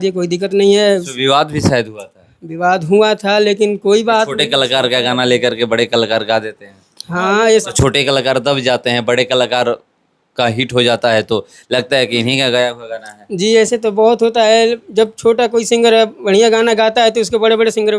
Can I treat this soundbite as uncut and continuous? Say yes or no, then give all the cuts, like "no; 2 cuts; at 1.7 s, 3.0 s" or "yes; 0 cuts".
yes; 0 cuts